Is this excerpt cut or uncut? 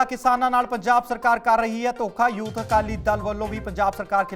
uncut